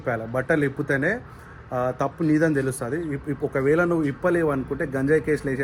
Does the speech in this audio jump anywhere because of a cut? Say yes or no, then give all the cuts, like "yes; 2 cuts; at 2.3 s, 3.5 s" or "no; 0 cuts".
no; 0 cuts